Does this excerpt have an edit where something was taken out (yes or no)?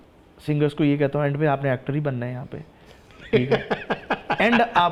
no